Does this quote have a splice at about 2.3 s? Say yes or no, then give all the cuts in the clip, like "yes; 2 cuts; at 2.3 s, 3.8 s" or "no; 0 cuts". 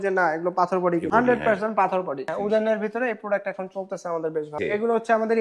yes; 3 cuts; at 1.1 s, 2.3 s, 4.5 s